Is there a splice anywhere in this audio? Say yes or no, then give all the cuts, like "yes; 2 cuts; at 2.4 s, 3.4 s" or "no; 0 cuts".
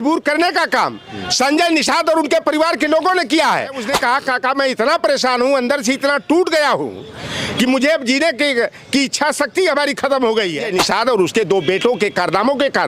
yes; 2 cuts; at 3.8 s, 10.7 s